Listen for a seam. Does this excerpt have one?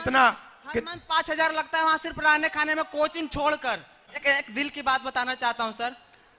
yes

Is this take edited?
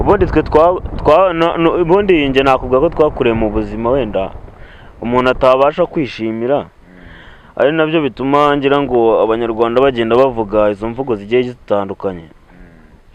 no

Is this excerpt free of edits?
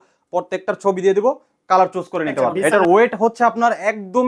no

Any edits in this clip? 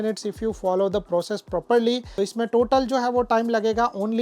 yes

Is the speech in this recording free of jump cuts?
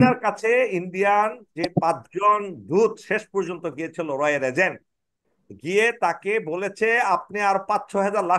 yes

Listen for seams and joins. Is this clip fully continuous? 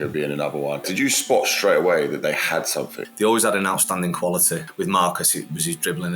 no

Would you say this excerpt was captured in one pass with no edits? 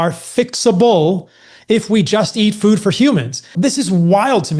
no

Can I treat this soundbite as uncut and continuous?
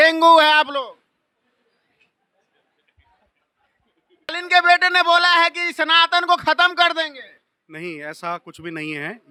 yes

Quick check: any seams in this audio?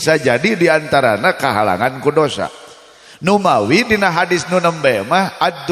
no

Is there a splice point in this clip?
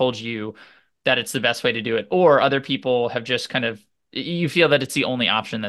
no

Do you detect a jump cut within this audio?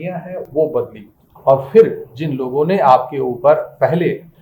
yes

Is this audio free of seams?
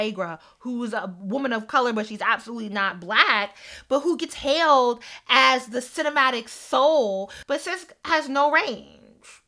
no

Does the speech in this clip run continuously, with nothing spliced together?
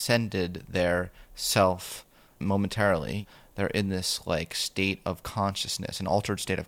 no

